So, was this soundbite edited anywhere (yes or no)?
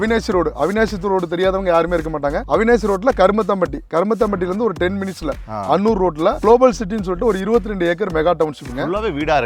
no